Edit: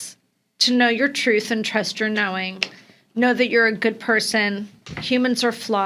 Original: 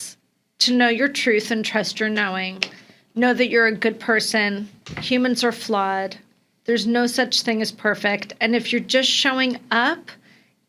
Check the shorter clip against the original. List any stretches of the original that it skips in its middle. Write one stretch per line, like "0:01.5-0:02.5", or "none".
none